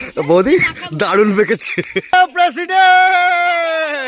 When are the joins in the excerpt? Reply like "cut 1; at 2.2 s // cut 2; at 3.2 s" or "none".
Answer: cut 1; at 2.1 s